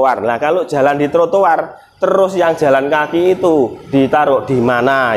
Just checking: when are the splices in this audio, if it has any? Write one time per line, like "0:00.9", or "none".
none